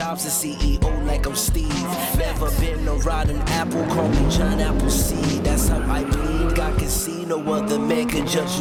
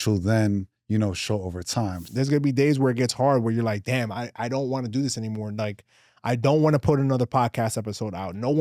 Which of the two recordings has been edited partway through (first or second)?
second